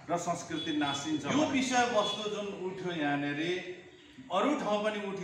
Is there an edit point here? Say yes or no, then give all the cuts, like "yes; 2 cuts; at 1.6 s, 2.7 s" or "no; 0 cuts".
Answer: yes; 1 cut; at 1.3 s